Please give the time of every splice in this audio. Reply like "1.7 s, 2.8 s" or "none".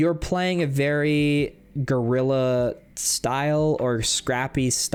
none

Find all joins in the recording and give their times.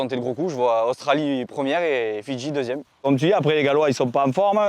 3.0 s

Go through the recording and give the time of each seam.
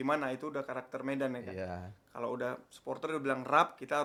none

